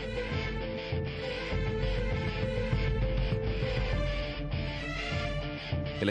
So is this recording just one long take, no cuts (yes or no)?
yes